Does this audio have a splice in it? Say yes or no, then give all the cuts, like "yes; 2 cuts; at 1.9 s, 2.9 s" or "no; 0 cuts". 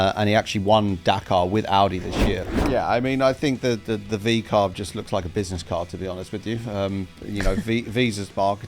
yes; 1 cut; at 2.5 s